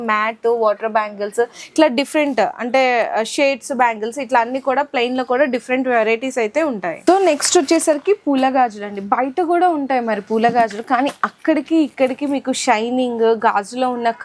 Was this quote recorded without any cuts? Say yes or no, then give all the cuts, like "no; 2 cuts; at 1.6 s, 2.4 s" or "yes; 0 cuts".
yes; 0 cuts